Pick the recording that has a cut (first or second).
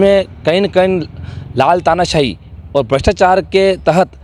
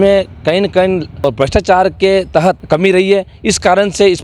second